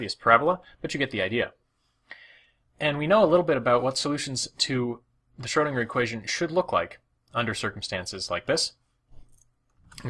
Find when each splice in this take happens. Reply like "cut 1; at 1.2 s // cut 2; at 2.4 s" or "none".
cut 1; at 7.8 s